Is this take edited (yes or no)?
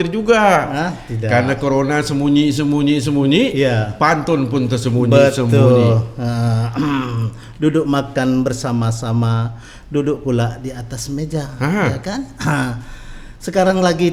no